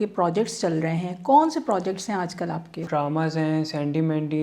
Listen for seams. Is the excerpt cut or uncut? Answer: cut